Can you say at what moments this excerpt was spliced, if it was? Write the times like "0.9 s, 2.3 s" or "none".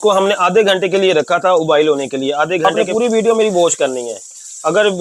2.7 s